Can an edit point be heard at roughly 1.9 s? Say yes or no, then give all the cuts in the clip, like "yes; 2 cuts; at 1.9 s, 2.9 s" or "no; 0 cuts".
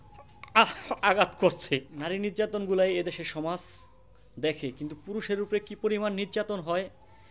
yes; 1 cut; at 1.9 s